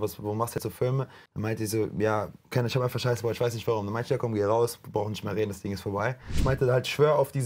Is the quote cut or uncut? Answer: cut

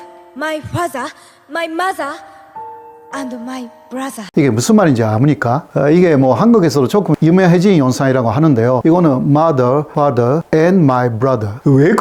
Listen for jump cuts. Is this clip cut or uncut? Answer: uncut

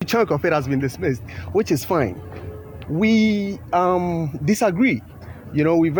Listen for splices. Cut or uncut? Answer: uncut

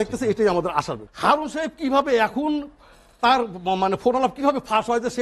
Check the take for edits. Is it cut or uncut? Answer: cut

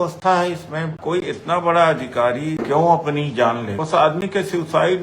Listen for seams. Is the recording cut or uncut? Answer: cut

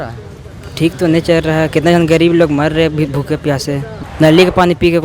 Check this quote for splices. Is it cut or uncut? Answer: cut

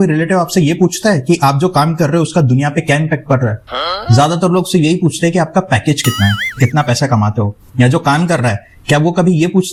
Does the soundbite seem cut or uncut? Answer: uncut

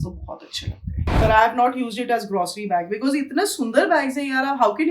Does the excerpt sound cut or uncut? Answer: cut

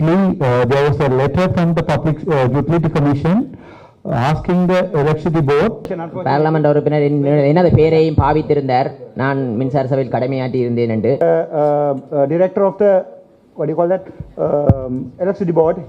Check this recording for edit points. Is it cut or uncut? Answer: cut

